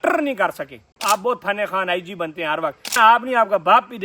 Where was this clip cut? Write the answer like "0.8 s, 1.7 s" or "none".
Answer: 0.9 s, 2.9 s